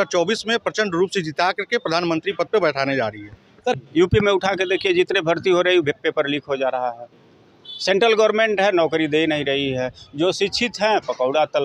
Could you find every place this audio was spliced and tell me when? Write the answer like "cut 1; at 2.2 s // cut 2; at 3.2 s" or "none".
cut 1; at 3.8 s